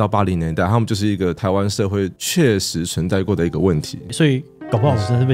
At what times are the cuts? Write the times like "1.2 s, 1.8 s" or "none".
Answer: 4.1 s